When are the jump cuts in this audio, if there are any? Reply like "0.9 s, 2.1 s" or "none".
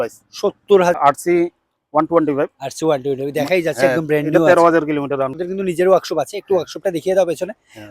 1.0 s, 5.4 s